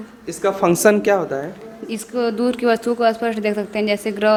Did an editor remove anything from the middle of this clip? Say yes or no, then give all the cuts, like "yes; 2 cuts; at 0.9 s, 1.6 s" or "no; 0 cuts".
no; 0 cuts